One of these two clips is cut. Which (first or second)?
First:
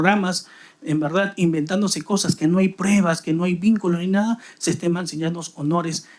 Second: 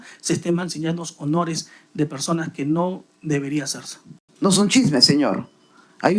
second